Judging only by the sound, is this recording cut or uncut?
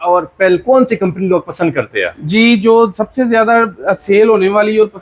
uncut